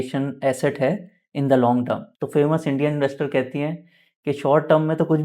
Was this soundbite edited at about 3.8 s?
no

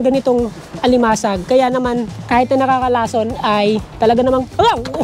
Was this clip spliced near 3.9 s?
yes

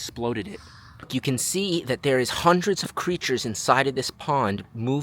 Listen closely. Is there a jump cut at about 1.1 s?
yes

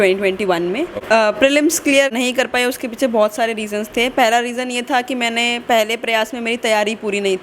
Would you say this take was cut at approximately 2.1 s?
yes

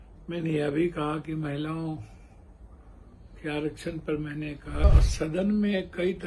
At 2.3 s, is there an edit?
no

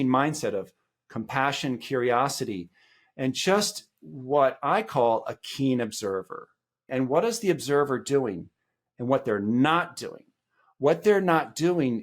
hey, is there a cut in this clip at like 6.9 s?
yes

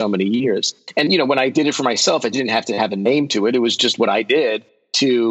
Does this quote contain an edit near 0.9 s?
yes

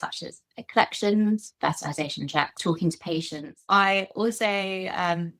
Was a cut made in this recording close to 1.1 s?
no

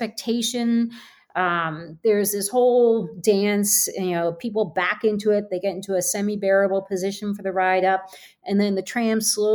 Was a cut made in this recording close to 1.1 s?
no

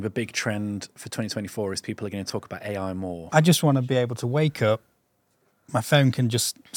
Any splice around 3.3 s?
yes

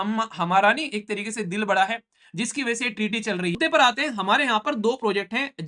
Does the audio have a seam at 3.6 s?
yes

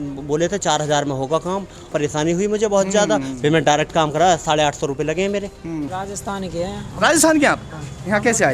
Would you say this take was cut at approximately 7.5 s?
no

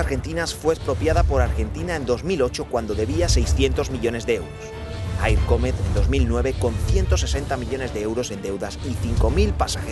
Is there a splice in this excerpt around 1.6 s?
yes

